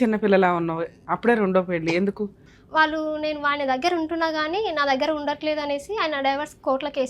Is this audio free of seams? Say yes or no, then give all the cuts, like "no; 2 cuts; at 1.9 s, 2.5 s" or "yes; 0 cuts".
no; 1 cut; at 2.4 s